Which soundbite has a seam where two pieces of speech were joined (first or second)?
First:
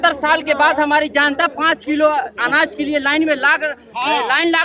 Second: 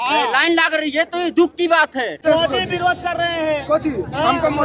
second